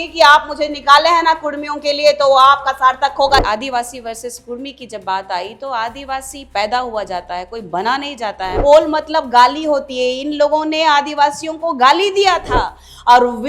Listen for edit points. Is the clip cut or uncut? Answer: cut